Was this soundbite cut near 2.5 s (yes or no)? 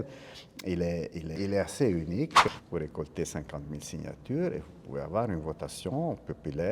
yes